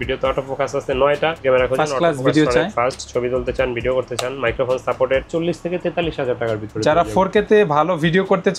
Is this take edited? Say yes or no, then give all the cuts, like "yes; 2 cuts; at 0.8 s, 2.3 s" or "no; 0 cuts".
yes; 2 cuts; at 1.4 s, 5.3 s